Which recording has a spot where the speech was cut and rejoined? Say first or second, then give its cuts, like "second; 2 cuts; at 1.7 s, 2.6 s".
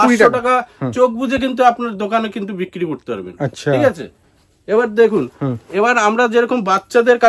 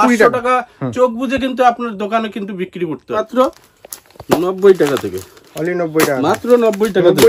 second; 1 cut; at 3.2 s